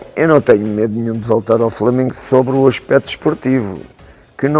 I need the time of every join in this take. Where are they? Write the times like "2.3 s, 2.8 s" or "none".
none